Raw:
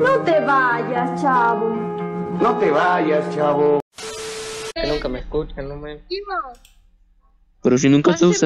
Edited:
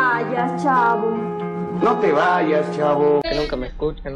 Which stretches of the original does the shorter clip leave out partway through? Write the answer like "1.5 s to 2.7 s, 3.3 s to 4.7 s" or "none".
3.8 s to 4.8 s